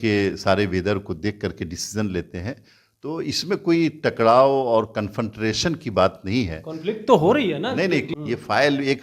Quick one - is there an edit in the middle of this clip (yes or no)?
yes